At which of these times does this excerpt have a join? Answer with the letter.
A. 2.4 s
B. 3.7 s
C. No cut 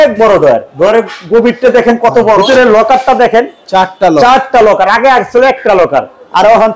A